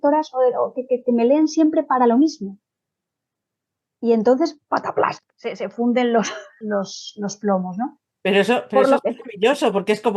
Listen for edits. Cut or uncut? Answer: cut